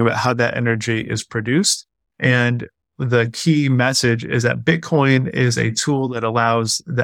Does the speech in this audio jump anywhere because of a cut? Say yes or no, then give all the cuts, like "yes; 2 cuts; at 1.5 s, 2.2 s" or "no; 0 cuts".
no; 0 cuts